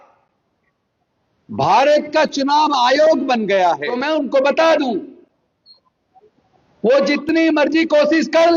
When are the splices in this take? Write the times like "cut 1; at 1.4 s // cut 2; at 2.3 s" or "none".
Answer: cut 1; at 3.9 s

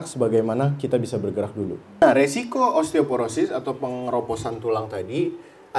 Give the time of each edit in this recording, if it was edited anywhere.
cut 1; at 2.0 s

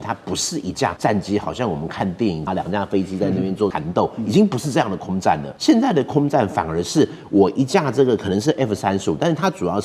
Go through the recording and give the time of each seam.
cut 1; at 1.0 s // cut 2; at 2.5 s // cut 3; at 3.8 s // cut 4; at 5.5 s

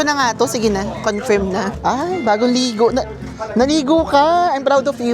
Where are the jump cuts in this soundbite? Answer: cut 1; at 1.7 s

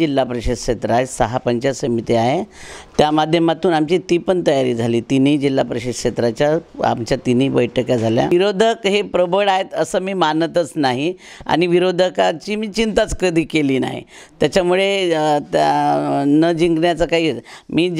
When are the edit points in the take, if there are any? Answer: cut 1; at 8.3 s

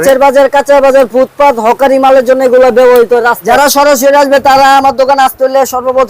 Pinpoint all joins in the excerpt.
cut 1; at 3.4 s

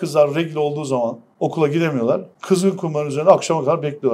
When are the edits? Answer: cut 1; at 1.2 s // cut 2; at 2.3 s

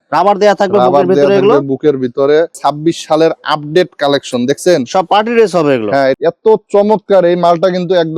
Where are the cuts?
cut 1; at 2.6 s // cut 2; at 6.2 s

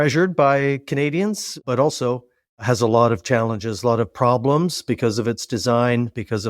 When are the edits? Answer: cut 1; at 1.6 s

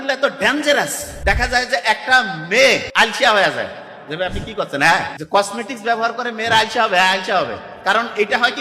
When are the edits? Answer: cut 1; at 1.0 s // cut 2; at 2.9 s // cut 3; at 5.2 s

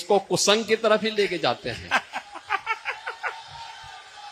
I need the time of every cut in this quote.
none

